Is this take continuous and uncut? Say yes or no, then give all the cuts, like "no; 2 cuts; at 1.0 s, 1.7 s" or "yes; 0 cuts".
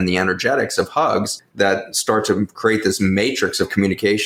yes; 0 cuts